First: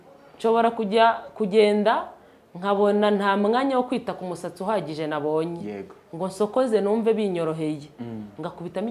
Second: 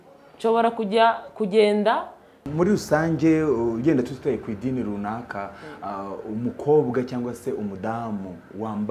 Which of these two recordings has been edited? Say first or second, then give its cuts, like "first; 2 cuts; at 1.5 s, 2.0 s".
second; 1 cut; at 2.4 s